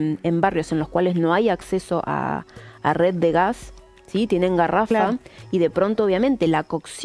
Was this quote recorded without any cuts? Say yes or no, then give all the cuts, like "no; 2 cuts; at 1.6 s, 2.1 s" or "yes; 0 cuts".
yes; 0 cuts